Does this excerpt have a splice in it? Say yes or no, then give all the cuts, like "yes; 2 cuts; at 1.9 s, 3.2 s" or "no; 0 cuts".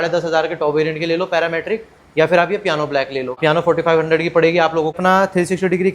yes; 2 cuts; at 3.4 s, 5.0 s